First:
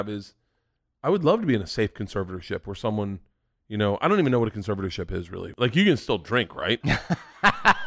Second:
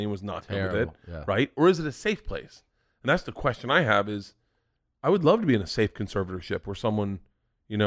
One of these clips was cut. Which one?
first; 2 cuts; at 5.4 s, 6.8 s

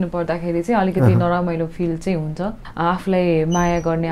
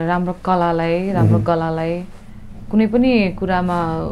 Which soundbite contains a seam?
first; 1 cut; at 2.6 s

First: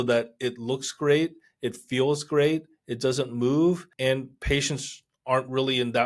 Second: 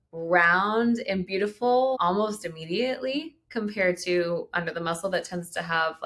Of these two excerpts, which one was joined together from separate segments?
first; 1 cut; at 3.9 s

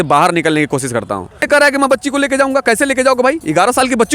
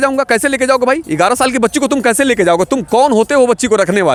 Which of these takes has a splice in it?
first; 1 cut; at 1.4 s

